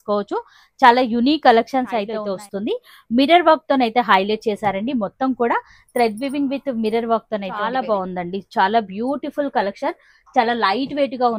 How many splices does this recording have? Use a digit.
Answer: 2